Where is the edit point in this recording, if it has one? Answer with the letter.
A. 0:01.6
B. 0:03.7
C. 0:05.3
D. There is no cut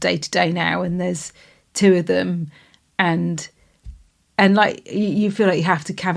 D